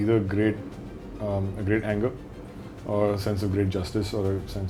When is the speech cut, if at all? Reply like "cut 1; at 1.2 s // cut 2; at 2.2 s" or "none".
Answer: none